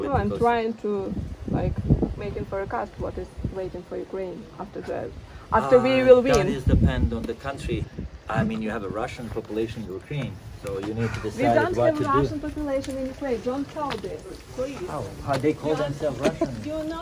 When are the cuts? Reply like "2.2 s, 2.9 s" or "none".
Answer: 7.9 s

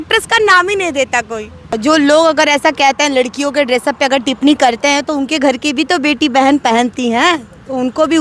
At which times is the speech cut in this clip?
1.7 s

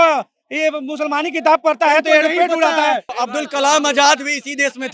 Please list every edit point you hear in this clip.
3.1 s

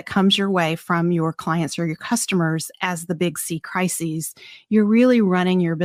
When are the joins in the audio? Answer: none

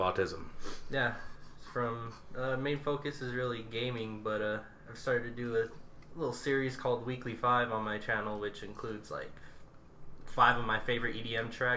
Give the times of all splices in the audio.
9.7 s

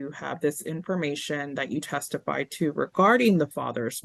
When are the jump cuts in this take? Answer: none

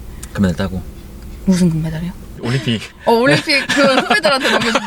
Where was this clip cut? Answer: none

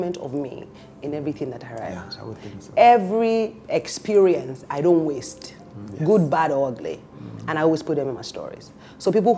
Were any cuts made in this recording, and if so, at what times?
none

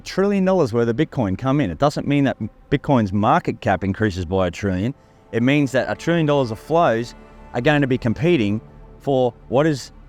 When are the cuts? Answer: none

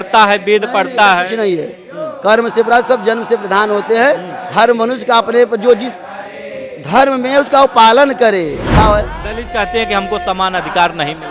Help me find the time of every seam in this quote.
8.7 s

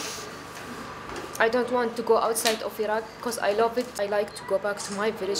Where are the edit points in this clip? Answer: 3.9 s

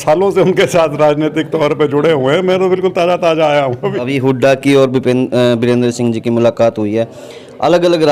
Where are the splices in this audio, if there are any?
3.9 s

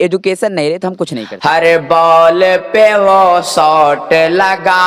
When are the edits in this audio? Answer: 1.2 s

